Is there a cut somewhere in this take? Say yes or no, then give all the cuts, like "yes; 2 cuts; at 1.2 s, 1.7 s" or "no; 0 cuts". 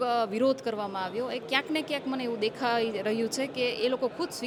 no; 0 cuts